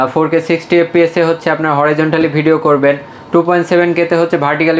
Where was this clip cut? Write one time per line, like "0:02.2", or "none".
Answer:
none